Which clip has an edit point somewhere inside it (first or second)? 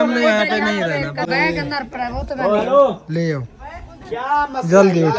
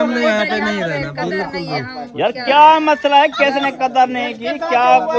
first